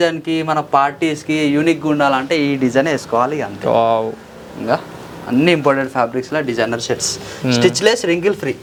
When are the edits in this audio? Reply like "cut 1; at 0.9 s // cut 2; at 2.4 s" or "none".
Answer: none